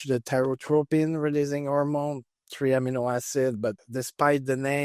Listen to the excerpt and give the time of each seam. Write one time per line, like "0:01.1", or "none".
0:03.8

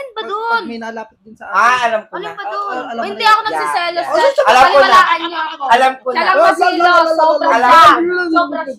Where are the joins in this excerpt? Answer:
none

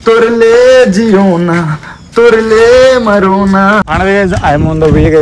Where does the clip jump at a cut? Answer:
0:03.8

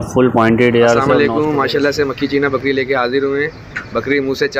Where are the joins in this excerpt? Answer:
0:01.1

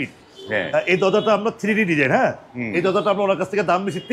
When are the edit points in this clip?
none

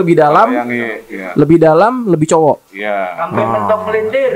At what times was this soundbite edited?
none

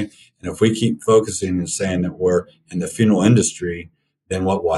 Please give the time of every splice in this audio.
none

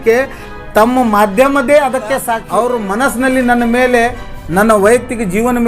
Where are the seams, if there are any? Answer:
0:02.4

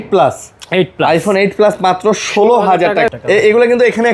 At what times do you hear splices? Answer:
0:03.1

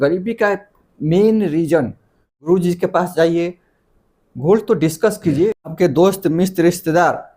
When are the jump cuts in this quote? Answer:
0:02.5
0:05.5

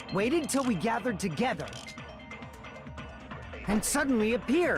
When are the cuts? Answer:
none

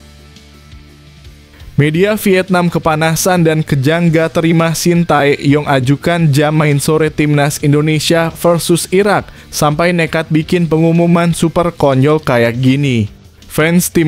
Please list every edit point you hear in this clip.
0:01.7

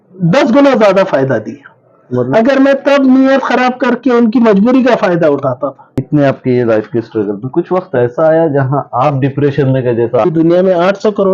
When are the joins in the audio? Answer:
0:06.0
0:10.2

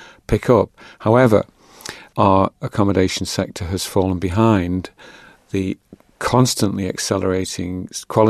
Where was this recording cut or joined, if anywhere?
0:02.0

